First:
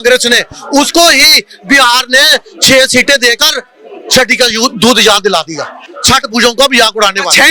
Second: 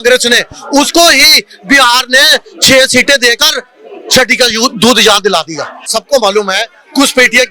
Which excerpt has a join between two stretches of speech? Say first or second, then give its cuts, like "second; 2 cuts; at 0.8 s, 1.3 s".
second; 1 cut; at 5.9 s